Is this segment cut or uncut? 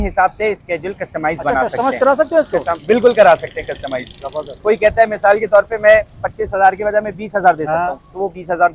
uncut